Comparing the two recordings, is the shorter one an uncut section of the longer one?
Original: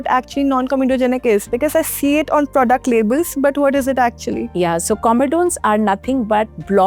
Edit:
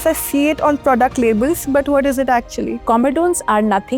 no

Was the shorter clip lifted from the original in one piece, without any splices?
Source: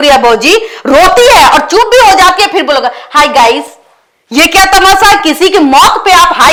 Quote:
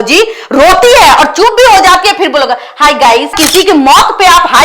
no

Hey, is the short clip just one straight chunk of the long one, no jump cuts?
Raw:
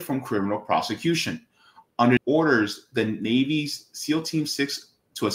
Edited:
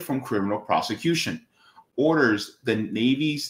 no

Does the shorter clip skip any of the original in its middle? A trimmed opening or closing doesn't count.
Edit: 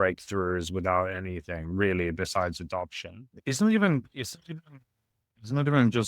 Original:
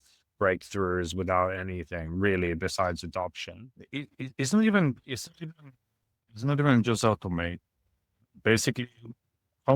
yes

